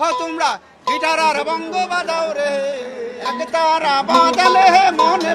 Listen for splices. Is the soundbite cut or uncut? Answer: cut